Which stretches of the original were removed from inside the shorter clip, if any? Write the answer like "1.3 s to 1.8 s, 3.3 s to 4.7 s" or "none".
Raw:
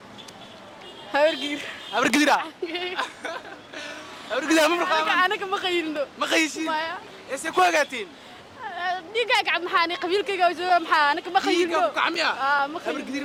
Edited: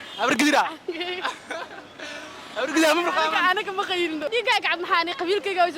6.0 s to 9.1 s